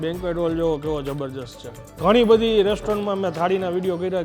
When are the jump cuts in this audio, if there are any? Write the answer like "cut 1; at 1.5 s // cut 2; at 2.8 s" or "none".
cut 1; at 1.9 s